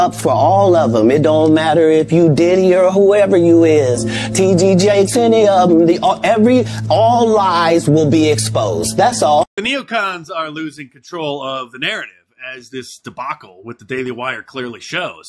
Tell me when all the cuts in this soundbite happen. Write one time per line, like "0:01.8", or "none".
0:09.6